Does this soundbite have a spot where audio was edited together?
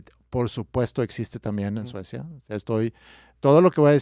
no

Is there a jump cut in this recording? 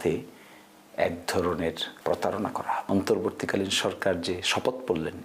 yes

